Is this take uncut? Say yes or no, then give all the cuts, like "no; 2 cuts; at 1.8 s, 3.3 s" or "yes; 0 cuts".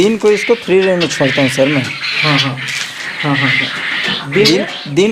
yes; 0 cuts